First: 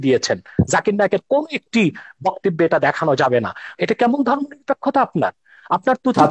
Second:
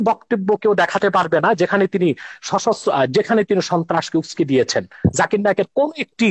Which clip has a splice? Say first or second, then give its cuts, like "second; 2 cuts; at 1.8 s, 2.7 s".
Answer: first; 1 cut; at 3.7 s